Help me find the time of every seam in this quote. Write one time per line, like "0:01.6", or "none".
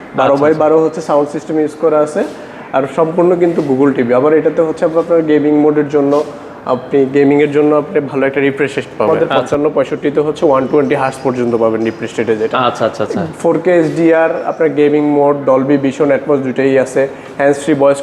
0:09.3